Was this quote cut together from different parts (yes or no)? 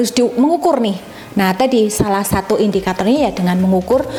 no